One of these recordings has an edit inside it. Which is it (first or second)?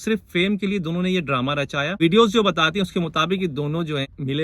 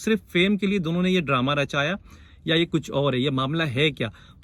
first